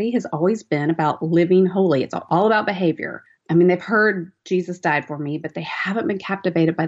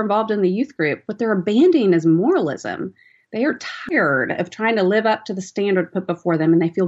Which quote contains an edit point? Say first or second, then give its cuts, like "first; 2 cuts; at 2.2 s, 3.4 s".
first; 1 cut; at 2.3 s